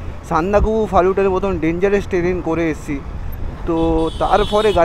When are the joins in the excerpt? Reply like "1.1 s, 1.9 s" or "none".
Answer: none